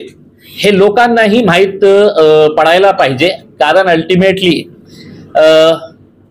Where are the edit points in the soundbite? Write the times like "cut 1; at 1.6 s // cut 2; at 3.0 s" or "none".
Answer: none